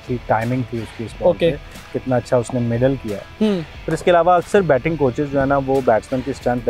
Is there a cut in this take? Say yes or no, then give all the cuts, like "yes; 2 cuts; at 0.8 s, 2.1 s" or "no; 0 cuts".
no; 0 cuts